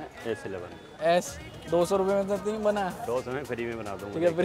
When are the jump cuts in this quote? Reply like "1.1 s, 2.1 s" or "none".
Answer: 1.0 s